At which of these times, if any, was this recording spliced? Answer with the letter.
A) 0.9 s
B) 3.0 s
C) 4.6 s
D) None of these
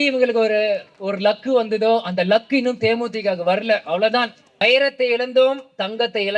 C